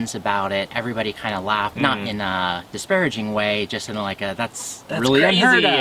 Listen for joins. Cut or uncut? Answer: cut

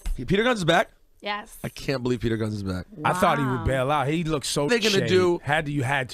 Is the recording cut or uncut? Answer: uncut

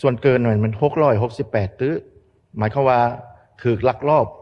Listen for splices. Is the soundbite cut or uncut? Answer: uncut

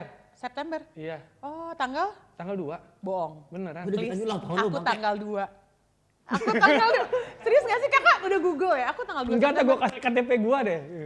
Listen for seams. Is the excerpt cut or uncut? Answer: uncut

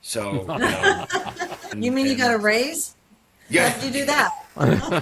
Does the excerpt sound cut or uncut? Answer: cut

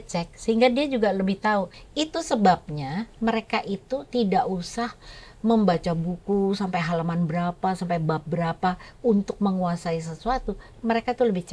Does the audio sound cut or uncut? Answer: cut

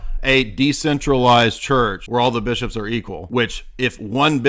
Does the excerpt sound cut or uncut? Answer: cut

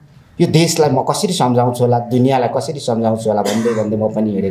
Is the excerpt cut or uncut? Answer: uncut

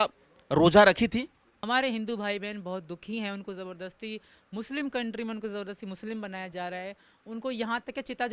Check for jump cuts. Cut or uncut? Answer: cut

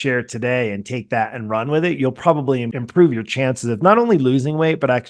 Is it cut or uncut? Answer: uncut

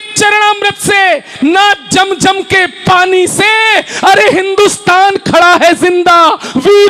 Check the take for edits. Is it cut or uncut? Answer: uncut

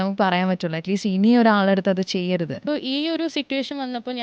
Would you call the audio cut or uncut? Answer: cut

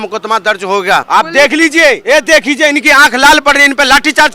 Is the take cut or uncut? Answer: cut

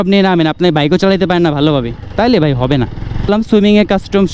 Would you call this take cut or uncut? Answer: cut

